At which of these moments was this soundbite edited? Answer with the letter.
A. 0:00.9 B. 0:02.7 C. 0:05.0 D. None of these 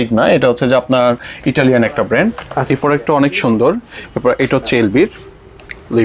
B